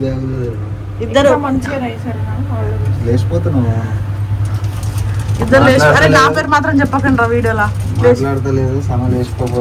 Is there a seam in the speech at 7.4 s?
no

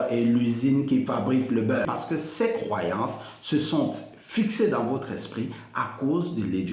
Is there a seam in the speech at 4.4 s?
no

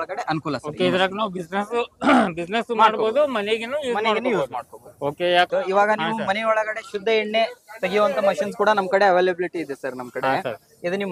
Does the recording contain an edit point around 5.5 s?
yes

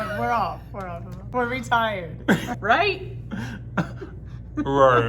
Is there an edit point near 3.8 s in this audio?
no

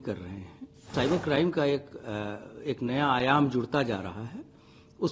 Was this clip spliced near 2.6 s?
no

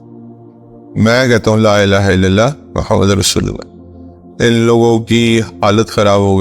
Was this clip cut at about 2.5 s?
no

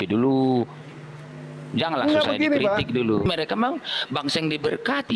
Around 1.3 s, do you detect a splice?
no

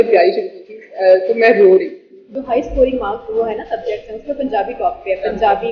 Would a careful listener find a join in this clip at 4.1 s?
no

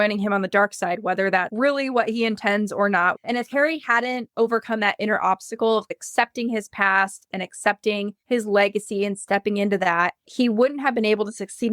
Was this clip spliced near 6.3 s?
no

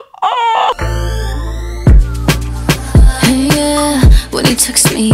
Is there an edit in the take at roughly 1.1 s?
yes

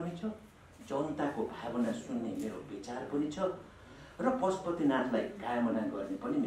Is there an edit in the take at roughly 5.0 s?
no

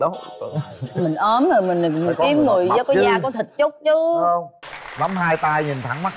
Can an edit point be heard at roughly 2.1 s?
no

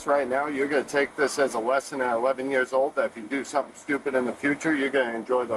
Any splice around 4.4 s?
no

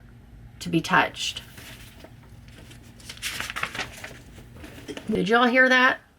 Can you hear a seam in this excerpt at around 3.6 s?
no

